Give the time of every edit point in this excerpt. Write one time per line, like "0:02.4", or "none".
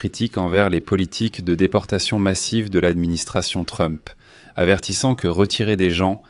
none